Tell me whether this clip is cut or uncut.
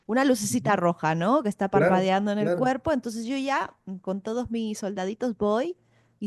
uncut